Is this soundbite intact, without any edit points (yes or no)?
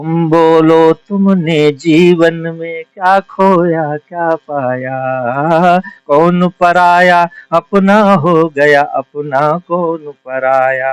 yes